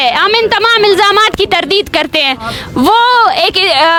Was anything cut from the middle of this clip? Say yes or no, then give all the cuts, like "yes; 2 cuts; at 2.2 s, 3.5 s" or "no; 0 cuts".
no; 0 cuts